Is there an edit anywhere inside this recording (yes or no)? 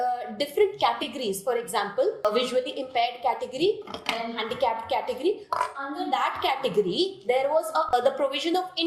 yes